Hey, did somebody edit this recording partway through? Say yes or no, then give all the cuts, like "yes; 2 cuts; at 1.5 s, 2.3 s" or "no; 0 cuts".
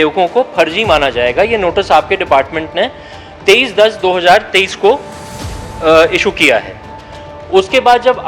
no; 0 cuts